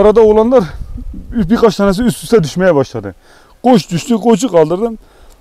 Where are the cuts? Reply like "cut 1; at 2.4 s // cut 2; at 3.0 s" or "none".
none